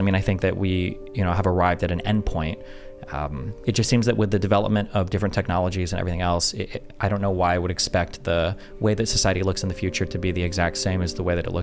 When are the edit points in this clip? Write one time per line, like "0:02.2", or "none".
none